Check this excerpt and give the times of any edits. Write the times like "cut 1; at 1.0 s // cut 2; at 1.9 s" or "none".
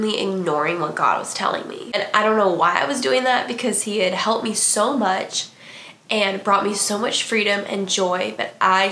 cut 1; at 1.8 s